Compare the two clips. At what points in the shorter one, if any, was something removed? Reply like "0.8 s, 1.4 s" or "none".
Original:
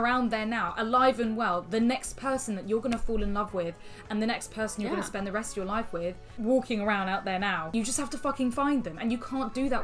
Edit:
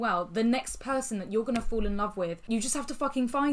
2.4 s